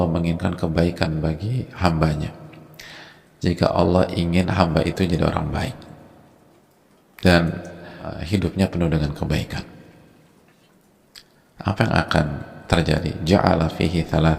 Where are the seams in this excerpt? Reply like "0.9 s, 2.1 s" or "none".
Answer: 8.1 s